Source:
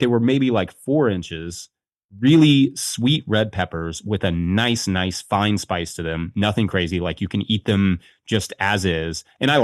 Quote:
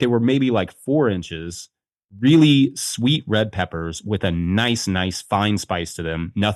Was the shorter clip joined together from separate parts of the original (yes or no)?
no